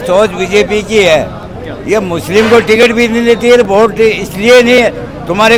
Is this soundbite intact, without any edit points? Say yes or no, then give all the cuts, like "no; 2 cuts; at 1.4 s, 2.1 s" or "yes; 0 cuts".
yes; 0 cuts